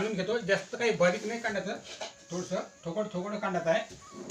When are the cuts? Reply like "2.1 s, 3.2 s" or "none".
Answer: none

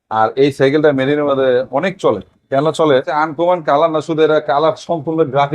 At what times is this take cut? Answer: 3.1 s

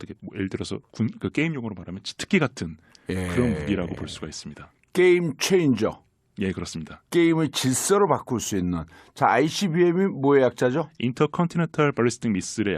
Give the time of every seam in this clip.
5.1 s

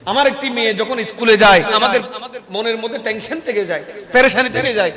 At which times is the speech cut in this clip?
1.8 s

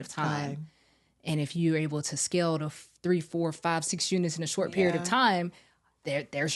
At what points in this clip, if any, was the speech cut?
none

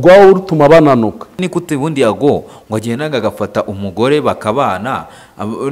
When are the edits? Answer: 1.4 s

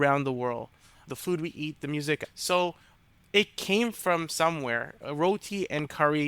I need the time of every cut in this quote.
2.2 s

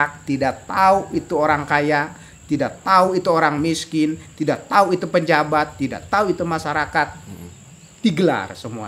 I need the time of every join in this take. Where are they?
none

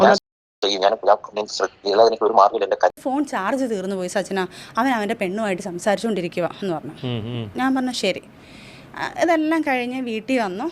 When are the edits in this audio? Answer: 2.9 s

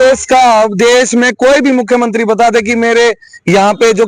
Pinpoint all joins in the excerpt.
none

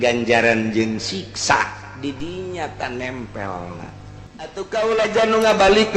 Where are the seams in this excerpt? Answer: 4.6 s

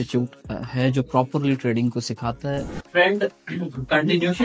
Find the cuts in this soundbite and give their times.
2.8 s

